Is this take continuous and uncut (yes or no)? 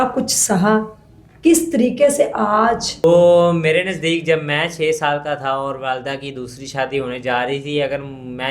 no